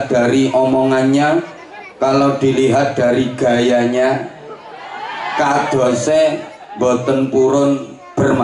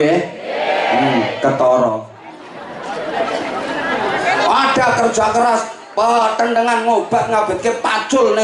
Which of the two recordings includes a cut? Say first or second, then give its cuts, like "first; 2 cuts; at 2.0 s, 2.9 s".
second; 1 cut; at 2.6 s